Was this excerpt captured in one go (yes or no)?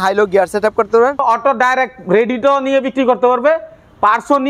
no